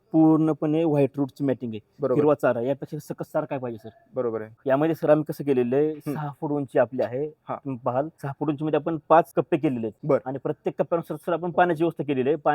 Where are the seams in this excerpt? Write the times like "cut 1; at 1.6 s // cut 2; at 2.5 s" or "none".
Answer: cut 1; at 4.5 s // cut 2; at 8.2 s // cut 3; at 9.6 s